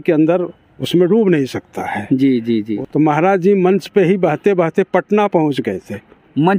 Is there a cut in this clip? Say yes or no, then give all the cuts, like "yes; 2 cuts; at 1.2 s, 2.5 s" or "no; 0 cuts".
yes; 1 cut; at 2.8 s